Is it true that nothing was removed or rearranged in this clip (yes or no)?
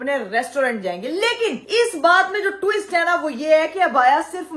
yes